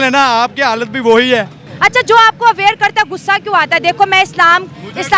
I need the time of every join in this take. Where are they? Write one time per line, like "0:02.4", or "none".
0:01.6

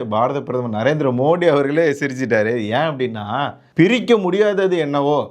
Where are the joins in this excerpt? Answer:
0:03.6

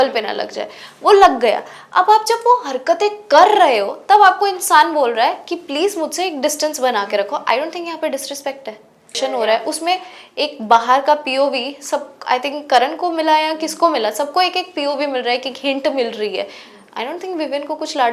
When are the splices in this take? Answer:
0:09.1

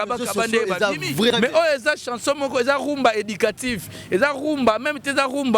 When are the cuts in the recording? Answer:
0:01.3

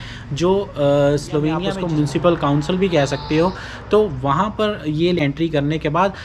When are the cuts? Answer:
0:01.7
0:05.2

